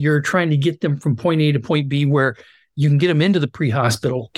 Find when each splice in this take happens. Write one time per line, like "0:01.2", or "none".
none